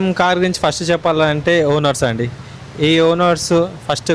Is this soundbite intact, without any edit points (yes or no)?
yes